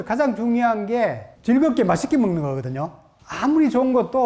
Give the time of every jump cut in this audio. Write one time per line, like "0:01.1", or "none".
none